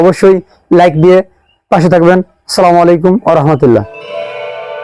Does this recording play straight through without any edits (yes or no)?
no